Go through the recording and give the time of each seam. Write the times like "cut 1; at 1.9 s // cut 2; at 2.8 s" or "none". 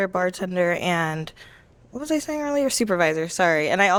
none